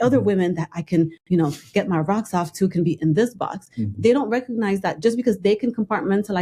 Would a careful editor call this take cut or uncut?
uncut